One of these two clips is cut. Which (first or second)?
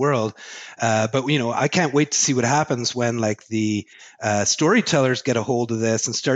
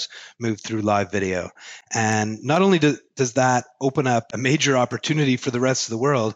second